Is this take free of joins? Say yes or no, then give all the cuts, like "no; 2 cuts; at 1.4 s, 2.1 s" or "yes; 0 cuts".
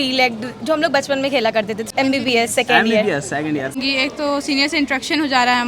no; 2 cuts; at 1.8 s, 3.8 s